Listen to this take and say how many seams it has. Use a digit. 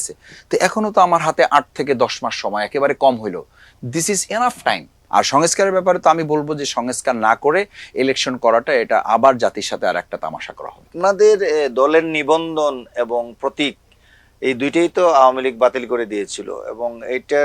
2